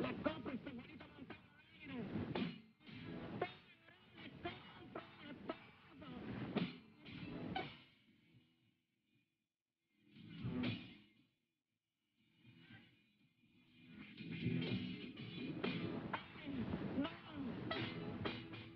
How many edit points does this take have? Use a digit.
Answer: 1